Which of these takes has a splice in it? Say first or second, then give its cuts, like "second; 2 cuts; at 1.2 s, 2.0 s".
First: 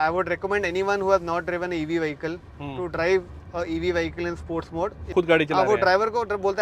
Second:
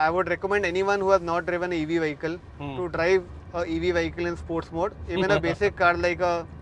first; 1 cut; at 5.1 s